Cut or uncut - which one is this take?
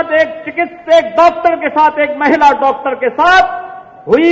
uncut